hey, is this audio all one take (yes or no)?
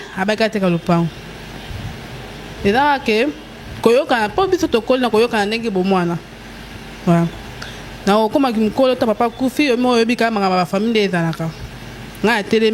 yes